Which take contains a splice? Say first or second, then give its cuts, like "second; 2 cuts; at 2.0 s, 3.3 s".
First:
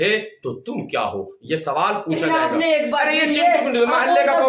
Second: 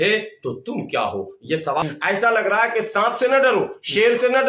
second; 1 cut; at 1.8 s